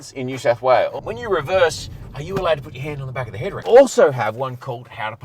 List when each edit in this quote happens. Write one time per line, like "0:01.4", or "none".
0:01.1
0:03.6